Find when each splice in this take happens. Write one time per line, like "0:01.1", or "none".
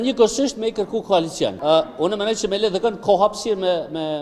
0:01.6